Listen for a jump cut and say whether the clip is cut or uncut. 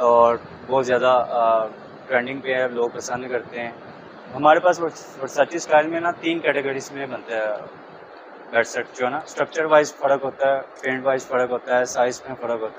uncut